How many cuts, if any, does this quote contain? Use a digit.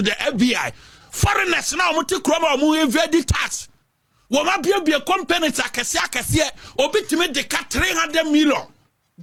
0